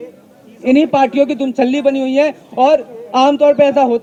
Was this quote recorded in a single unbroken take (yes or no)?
yes